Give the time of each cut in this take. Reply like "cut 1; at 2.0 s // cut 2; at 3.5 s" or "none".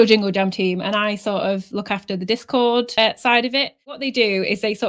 cut 1; at 4.0 s